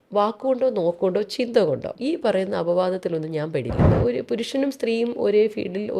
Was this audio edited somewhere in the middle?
yes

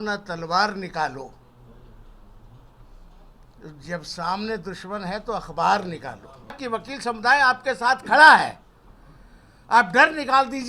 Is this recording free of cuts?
no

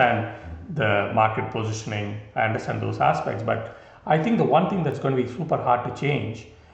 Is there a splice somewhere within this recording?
no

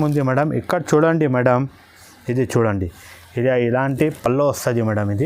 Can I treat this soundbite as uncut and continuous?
yes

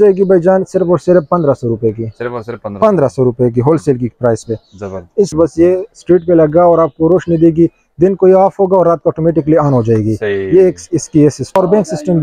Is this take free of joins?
no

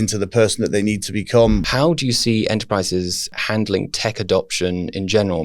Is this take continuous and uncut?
no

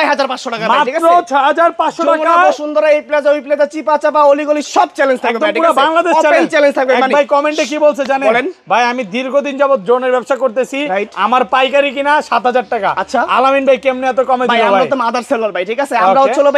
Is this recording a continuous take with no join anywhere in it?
yes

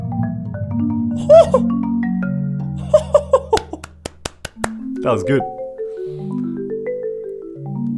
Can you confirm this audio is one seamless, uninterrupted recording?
yes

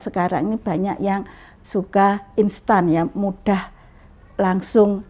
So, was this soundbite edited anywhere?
no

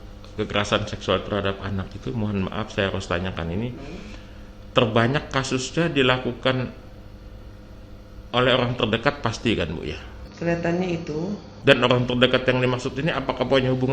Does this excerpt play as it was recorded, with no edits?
yes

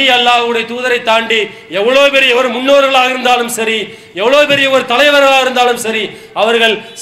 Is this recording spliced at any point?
no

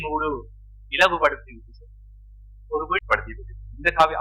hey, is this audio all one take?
no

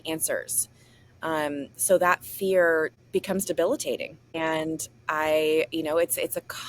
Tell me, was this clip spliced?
yes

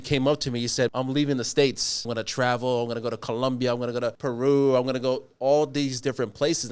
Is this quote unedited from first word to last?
no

